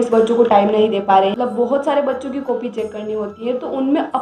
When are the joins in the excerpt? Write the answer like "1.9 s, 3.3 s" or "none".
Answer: 1.3 s